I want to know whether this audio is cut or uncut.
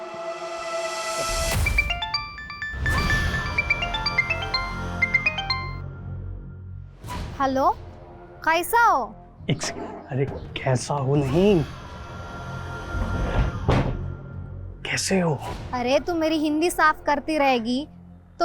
cut